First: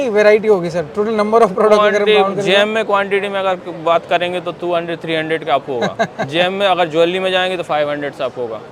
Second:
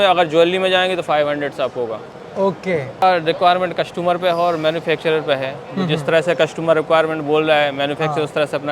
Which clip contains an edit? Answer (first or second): second